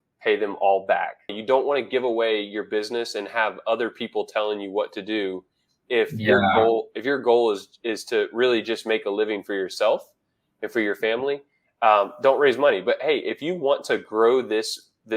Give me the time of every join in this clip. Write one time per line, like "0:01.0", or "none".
0:01.3